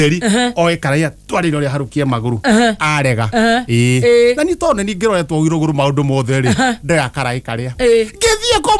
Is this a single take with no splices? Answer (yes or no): yes